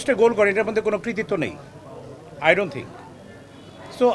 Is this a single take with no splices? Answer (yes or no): yes